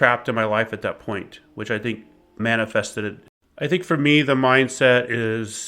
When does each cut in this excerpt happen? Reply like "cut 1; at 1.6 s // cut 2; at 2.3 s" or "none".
cut 1; at 3.2 s